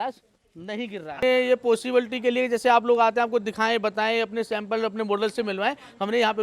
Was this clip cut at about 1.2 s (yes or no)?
yes